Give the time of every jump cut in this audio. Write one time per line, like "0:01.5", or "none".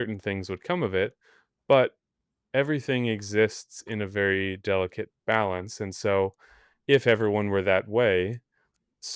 none